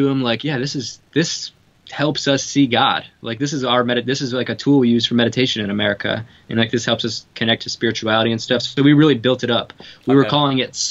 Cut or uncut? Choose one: uncut